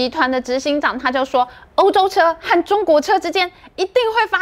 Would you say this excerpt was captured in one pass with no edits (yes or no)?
yes